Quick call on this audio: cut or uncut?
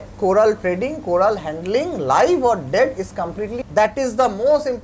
cut